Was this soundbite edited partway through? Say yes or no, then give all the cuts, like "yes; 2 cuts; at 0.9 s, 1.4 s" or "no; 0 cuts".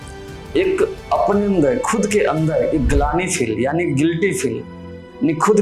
no; 0 cuts